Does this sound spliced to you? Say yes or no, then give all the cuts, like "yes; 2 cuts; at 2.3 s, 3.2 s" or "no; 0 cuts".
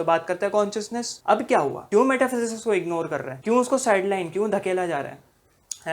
yes; 3 cuts; at 1.1 s, 1.8 s, 3.3 s